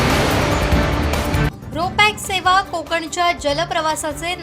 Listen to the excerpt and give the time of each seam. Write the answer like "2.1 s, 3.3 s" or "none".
1.3 s